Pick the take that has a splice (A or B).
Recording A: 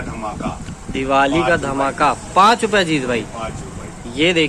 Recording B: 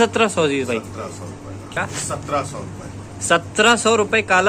B